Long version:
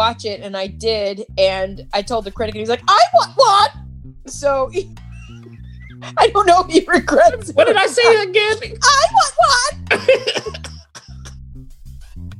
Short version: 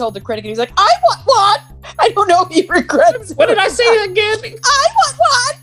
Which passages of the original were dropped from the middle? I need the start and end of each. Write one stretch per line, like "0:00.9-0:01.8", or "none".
0:03.9-0:06.0